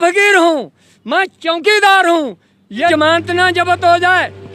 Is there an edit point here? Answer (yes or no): yes